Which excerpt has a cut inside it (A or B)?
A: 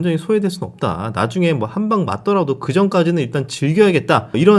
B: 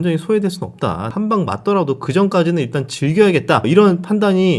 B